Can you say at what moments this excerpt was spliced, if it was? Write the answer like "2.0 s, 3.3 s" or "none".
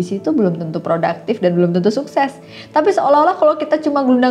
none